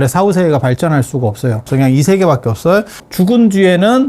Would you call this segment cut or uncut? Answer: cut